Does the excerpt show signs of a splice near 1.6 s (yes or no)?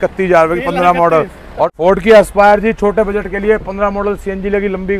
yes